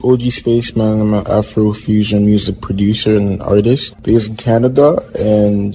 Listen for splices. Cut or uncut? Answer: uncut